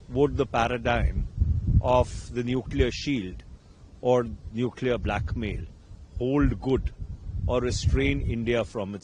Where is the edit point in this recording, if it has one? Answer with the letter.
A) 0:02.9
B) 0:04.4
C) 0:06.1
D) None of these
D